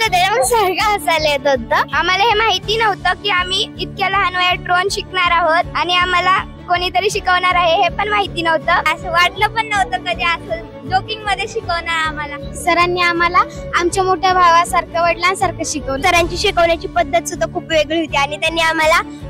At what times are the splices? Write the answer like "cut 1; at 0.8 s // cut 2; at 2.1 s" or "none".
none